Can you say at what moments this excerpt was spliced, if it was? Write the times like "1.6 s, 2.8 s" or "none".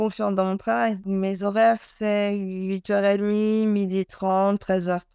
1.0 s

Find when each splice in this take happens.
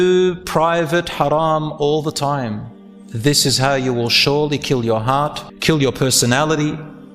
5.5 s

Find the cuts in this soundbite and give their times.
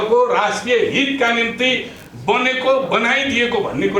none

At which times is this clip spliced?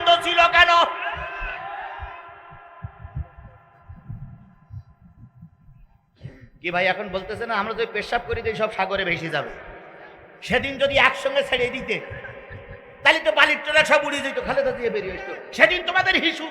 none

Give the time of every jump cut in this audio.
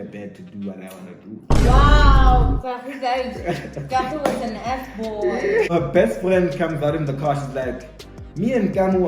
5.7 s

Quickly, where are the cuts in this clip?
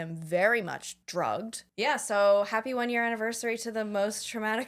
0.9 s, 1.7 s

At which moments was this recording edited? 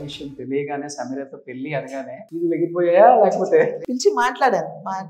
2.2 s, 3.8 s

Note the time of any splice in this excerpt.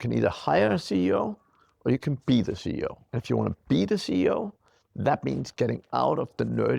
3.1 s

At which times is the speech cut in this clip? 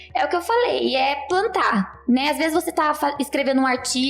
none

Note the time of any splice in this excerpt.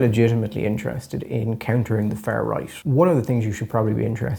2.7 s

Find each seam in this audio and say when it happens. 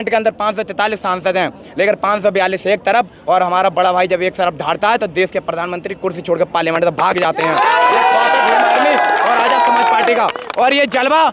none

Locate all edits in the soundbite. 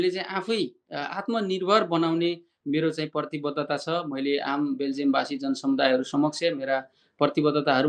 none

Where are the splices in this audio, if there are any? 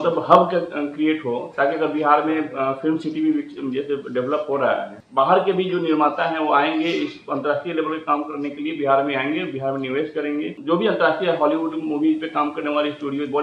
5.0 s, 10.6 s

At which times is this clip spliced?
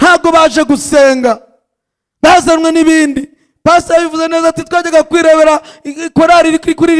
none

